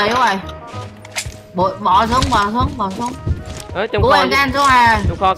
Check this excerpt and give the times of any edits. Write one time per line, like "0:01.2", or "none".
none